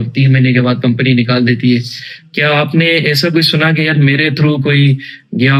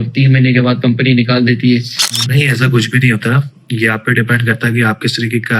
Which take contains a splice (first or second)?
second